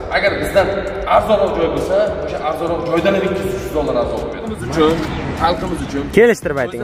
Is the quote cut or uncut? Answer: cut